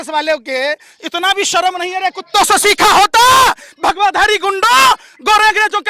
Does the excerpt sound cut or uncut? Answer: uncut